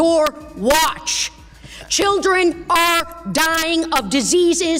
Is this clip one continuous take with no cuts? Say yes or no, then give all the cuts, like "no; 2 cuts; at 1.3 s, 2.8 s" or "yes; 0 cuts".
yes; 0 cuts